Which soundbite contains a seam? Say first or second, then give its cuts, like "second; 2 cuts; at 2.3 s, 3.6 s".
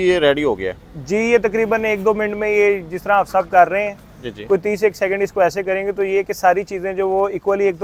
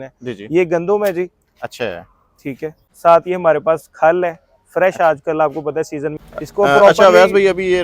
second; 2 cuts; at 2.8 s, 6.2 s